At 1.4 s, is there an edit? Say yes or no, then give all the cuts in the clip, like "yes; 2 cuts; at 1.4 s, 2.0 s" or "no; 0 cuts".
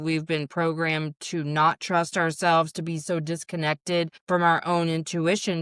no; 1 cut; at 4.2 s